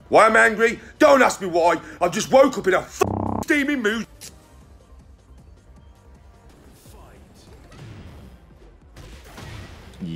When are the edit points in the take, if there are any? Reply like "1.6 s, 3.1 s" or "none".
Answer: 6.5 s